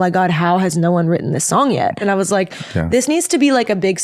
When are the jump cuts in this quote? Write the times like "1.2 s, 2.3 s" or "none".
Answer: 2.0 s